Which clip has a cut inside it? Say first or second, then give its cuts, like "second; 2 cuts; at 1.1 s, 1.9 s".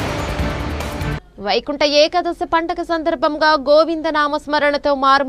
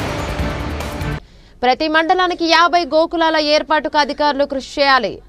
first; 1 cut; at 1.2 s